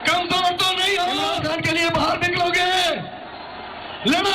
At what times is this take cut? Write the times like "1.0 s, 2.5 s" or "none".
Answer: 1.4 s